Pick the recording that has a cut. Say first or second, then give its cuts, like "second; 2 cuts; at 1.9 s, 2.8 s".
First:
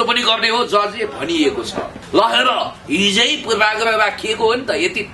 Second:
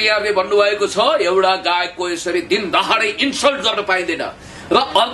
first; 1 cut; at 2.0 s